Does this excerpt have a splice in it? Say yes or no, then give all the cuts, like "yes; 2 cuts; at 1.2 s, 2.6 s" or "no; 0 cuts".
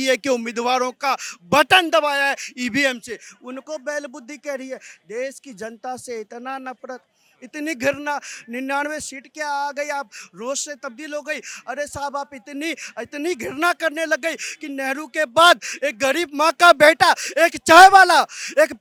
no; 0 cuts